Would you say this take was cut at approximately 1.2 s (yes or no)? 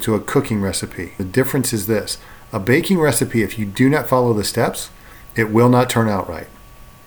yes